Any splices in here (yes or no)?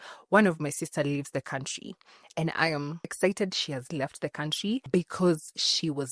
yes